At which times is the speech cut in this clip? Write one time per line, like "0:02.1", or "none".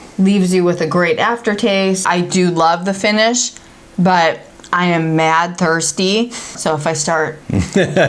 0:02.0
0:06.6